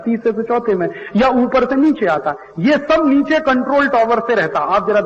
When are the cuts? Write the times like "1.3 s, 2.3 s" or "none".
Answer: 4.0 s